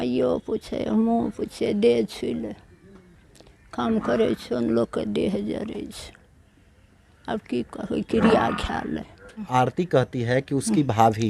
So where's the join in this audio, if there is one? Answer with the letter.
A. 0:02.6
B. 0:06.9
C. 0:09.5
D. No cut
C